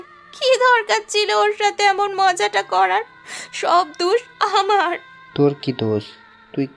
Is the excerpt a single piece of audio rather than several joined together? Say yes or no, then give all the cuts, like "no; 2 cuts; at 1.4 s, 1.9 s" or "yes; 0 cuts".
no; 1 cut; at 5.1 s